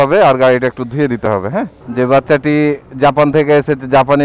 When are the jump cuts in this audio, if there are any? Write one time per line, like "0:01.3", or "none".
0:01.8